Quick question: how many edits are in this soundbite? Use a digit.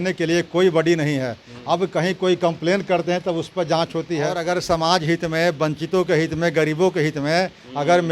1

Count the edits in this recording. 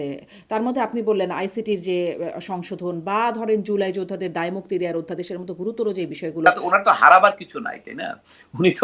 1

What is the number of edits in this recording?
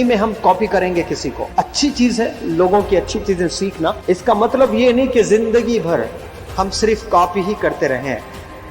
2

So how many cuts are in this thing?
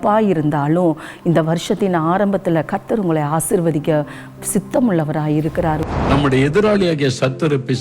1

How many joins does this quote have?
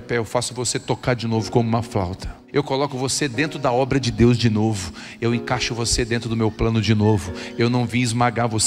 1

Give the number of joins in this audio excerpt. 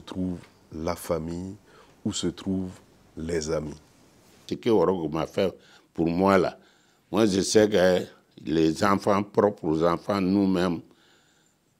1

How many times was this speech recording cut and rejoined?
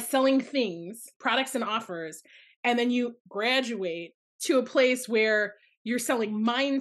1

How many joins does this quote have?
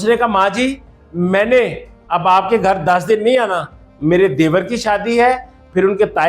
0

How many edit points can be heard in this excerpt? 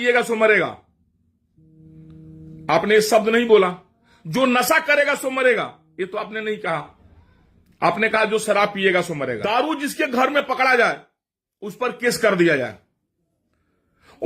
1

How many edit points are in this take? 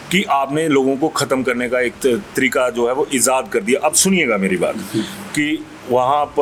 0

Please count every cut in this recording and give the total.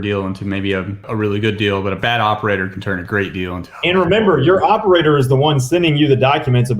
1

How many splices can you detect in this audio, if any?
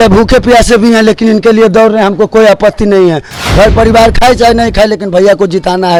0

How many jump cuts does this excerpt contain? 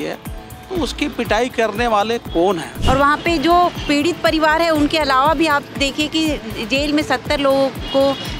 1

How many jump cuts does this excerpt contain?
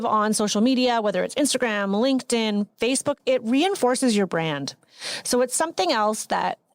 1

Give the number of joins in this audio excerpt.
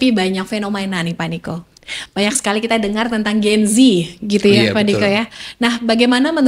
0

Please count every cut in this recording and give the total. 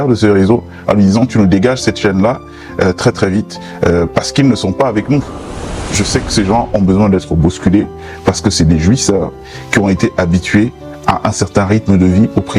1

